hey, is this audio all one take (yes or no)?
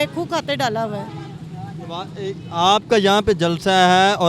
yes